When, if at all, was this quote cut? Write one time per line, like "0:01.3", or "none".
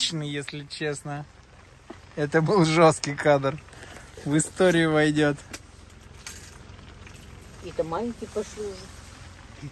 0:05.5